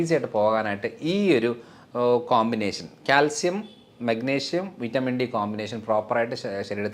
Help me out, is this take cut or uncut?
uncut